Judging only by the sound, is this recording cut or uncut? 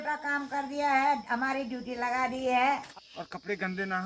cut